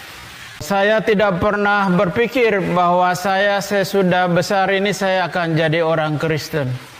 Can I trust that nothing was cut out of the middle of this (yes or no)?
yes